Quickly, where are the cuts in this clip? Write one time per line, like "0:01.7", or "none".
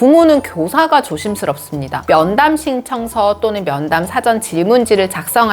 0:02.0